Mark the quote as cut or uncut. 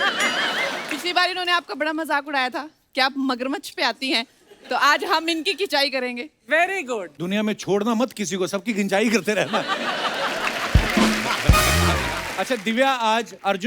cut